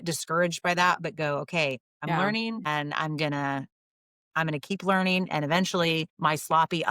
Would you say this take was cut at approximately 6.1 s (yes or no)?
yes